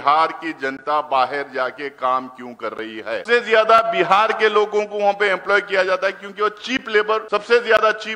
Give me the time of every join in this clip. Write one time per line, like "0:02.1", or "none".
0:03.2
0:07.2